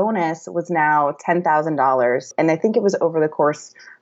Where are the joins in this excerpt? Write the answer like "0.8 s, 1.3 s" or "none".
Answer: 2.3 s